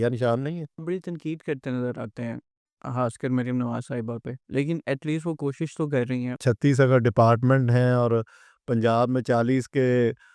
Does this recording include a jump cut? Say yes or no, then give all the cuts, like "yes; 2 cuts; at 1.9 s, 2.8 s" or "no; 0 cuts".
yes; 2 cuts; at 0.8 s, 6.4 s